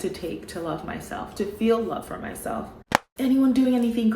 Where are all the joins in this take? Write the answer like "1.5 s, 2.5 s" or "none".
3.0 s